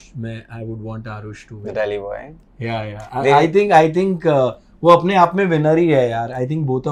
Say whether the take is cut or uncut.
uncut